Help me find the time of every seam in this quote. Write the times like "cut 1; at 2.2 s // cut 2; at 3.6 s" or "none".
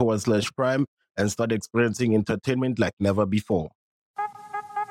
cut 1; at 3.9 s